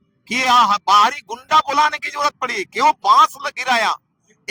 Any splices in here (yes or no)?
no